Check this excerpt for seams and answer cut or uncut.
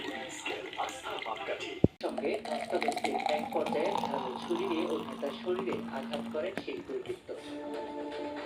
cut